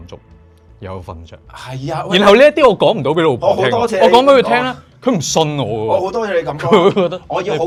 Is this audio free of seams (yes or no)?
yes